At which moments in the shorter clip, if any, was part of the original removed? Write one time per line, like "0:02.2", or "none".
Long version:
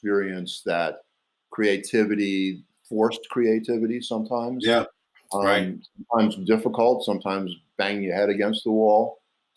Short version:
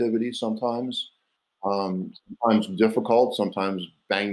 none